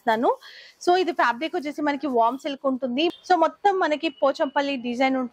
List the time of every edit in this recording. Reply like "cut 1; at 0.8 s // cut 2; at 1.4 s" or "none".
cut 1; at 3.1 s